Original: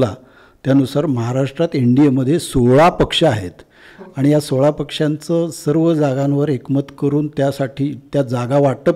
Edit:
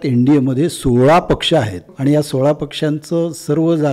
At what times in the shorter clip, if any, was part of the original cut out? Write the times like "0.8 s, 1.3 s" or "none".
1.8 s

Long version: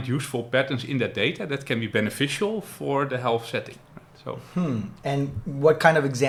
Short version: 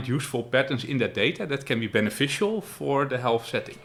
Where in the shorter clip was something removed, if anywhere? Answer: none

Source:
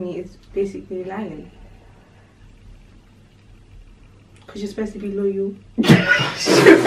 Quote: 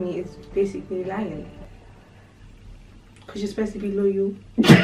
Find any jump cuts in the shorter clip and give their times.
3.2 s

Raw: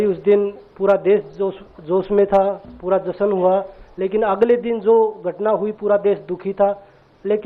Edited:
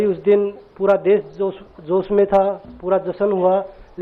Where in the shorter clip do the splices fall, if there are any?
none

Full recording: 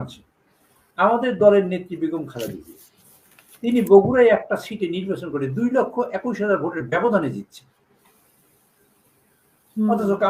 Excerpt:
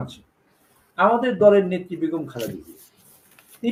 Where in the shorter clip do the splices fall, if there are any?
none

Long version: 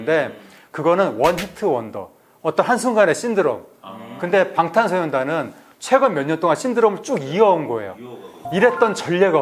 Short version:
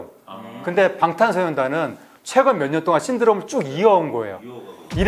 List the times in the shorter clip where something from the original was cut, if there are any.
none

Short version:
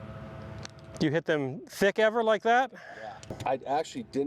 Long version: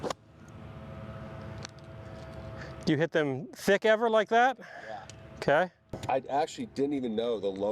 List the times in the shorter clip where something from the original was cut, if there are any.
0.9 s, 3.2 s

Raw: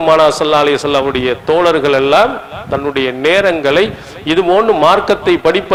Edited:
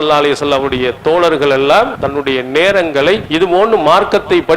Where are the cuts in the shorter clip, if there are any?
2.0 s, 3.3 s

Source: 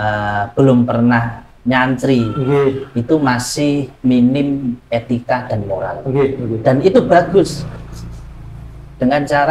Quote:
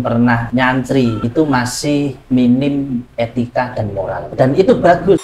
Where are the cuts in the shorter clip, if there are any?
1.0 s, 4.3 s

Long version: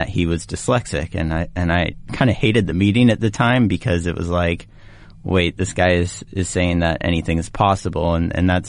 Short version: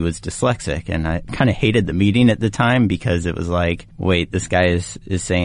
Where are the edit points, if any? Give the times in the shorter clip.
1.2 s, 3.9 s

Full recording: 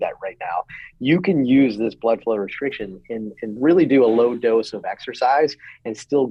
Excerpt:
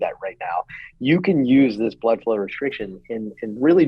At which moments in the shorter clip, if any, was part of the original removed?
none

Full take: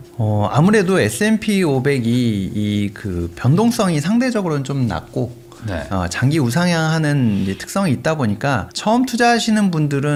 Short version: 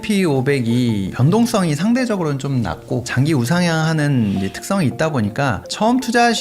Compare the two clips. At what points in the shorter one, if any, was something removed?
1.1 s, 3.1 s

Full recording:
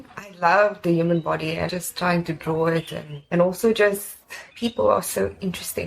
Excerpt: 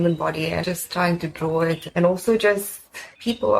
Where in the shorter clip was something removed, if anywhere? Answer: 1.8 s

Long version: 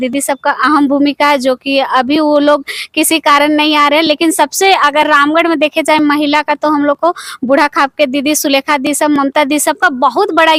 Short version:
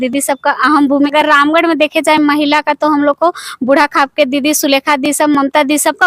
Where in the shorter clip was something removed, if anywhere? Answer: 1.1 s

